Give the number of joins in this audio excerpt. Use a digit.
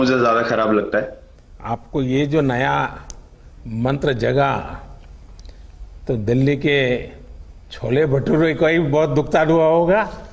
1